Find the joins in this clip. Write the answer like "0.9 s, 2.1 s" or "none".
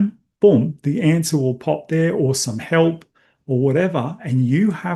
none